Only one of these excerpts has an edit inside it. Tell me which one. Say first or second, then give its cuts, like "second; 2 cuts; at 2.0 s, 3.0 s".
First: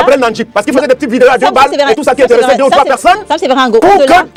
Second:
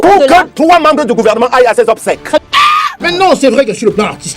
second; 1 cut; at 2.4 s